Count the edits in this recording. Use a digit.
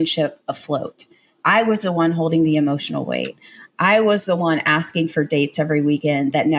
0